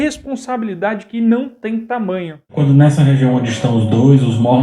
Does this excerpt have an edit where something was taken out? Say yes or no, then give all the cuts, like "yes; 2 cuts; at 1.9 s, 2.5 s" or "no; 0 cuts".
yes; 1 cut; at 2.5 s